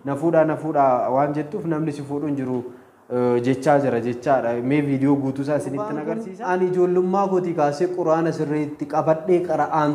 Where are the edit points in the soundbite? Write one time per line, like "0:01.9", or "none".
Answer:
0:06.2